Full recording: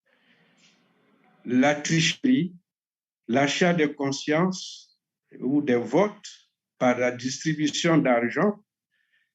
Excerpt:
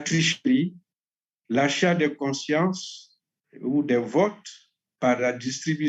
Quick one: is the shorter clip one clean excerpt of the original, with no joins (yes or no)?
yes